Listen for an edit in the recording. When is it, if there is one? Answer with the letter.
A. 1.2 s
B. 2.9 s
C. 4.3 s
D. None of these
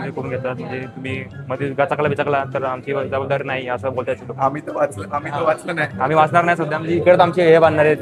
D